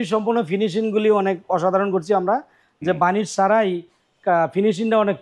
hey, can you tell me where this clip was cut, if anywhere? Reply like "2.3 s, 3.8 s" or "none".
none